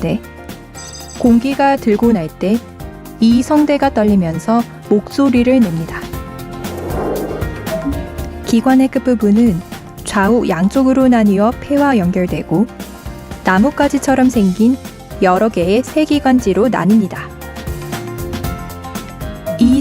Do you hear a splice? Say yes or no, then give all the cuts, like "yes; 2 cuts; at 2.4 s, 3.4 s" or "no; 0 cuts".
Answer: yes; 1 cut; at 13.3 s